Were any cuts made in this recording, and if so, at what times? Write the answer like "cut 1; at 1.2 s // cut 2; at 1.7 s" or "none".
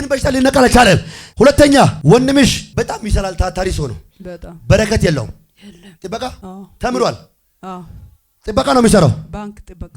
cut 1; at 1.2 s // cut 2; at 2.0 s // cut 3; at 2.6 s // cut 4; at 6.4 s